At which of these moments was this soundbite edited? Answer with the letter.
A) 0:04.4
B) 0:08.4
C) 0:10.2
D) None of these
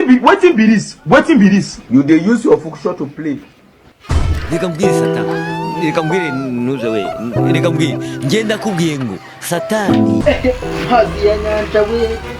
C